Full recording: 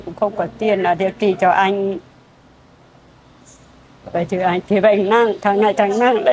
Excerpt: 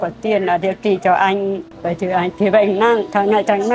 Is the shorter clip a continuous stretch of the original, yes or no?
no